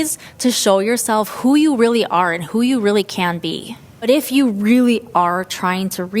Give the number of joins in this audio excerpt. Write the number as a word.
one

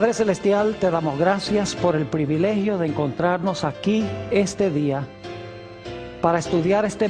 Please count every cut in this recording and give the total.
one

